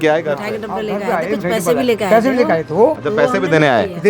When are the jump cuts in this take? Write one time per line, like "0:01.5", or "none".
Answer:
none